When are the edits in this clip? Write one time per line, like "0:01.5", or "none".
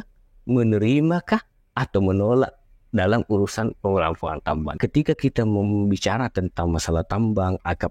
0:04.7